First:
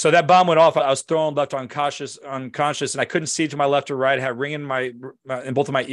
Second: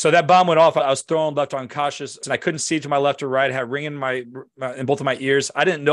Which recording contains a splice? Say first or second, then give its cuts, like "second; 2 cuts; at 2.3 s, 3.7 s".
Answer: second; 1 cut; at 2.2 s